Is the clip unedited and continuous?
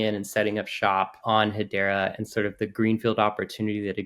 no; 1 cut; at 1.2 s

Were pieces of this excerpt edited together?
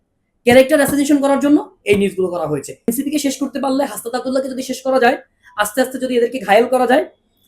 yes; 1 cut; at 2.9 s

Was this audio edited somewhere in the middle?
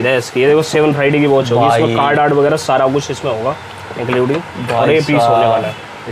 no; 0 cuts

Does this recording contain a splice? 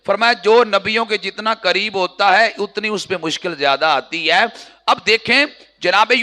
no; 0 cuts

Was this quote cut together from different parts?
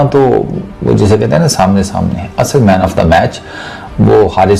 no; 0 cuts

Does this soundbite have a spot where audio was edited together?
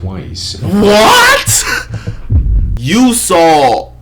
yes; 1 cut; at 2.7 s

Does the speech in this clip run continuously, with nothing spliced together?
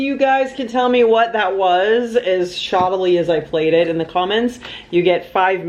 yes; 0 cuts

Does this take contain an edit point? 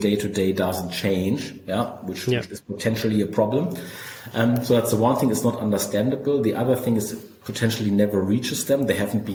no; 0 cuts

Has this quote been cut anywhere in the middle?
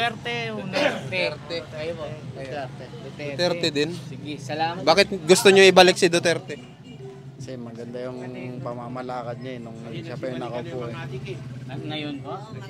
no; 0 cuts

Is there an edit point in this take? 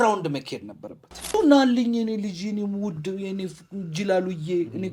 yes; 1 cut; at 1.3 s

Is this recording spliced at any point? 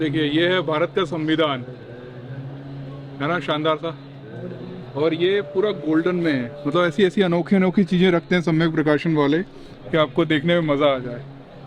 no; 0 cuts

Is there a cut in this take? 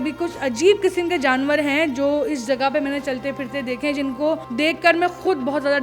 yes; 1 cut; at 4.5 s

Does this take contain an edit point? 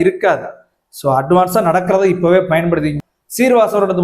yes; 1 cut; at 2.9 s

